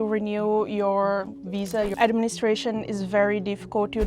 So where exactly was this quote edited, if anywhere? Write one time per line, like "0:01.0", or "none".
0:01.9